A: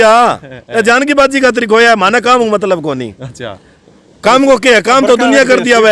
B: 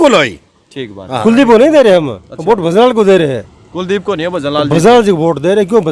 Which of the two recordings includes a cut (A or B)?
B